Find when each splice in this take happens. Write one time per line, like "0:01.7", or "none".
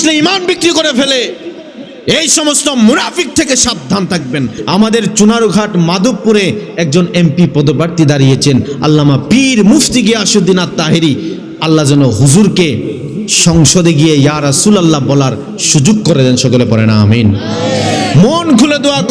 0:04.6

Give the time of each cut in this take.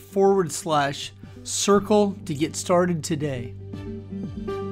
0:03.5

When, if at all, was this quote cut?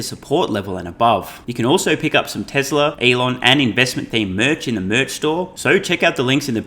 0:01.4
0:03.0
0:05.5

